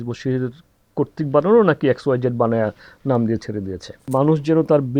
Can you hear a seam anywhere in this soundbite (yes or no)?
yes